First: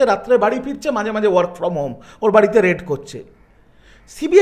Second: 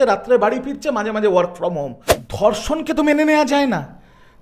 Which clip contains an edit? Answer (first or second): second